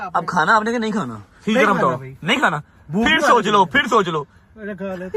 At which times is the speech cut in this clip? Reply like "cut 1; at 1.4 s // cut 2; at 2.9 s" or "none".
none